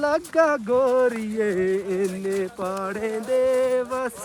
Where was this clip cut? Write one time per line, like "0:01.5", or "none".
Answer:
none